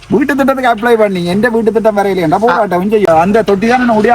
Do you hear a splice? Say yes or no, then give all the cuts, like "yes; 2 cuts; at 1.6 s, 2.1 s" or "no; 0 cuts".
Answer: yes; 1 cut; at 3.1 s